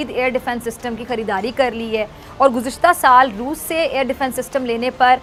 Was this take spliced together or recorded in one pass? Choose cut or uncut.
uncut